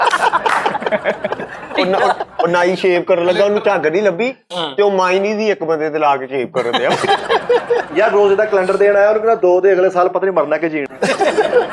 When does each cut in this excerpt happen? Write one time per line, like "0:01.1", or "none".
none